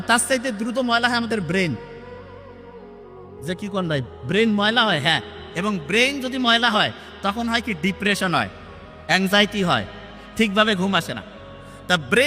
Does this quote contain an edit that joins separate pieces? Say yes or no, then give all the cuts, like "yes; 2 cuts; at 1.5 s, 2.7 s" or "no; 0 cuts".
no; 0 cuts